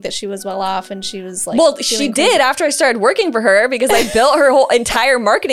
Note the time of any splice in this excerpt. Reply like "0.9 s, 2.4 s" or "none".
none